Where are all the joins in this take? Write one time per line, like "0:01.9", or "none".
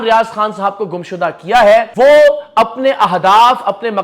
0:01.9